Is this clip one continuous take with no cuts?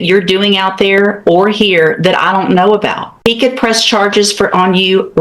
no; 1 cut; at 3.3 s

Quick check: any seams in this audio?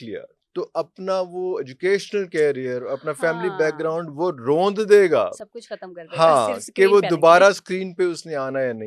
no; 0 cuts

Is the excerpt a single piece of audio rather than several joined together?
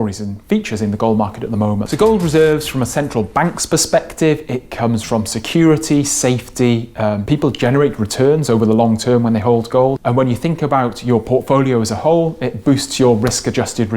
no; 3 cuts; at 1.9 s, 7.2 s, 10.0 s

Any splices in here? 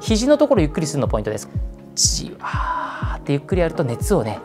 yes; 1 cut; at 1.4 s

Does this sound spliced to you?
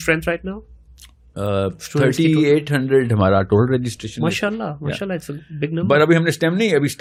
no; 0 cuts

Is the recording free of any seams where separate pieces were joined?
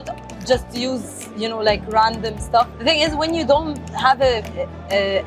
no; 1 cut; at 2.7 s

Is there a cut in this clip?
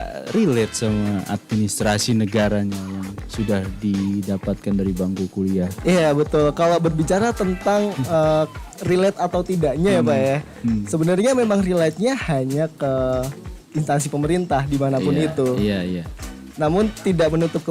no; 0 cuts

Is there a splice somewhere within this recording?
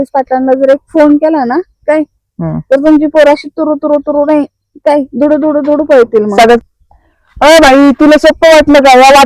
yes; 1 cut; at 6.9 s

